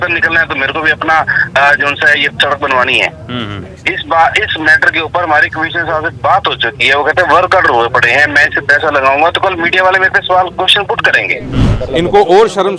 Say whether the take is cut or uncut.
cut